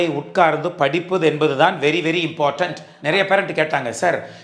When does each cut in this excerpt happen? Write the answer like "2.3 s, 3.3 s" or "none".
2.9 s